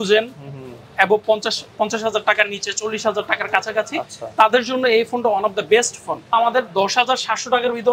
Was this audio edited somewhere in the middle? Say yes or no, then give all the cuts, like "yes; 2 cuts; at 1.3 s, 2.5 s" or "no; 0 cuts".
yes; 1 cut; at 6.3 s